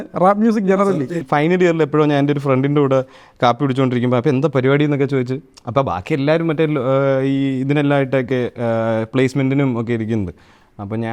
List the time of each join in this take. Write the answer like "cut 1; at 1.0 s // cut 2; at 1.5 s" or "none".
cut 1; at 1.1 s